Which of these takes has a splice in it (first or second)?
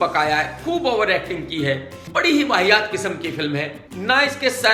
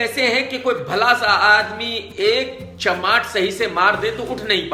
first